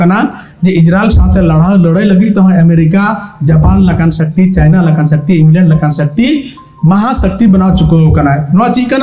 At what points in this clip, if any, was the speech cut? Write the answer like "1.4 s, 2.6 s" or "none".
none